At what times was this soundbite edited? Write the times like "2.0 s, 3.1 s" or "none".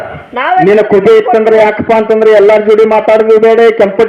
none